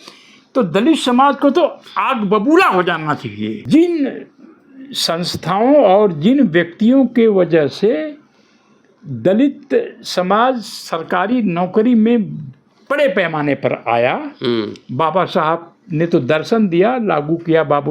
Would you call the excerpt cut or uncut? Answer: cut